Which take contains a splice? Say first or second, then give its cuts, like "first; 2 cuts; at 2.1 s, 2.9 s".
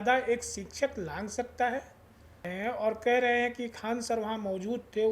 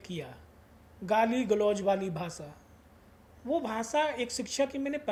first; 1 cut; at 2.5 s